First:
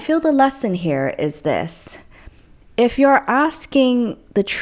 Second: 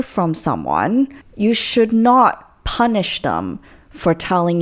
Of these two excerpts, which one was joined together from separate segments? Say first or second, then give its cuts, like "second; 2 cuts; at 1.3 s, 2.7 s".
second; 1 cut; at 1.2 s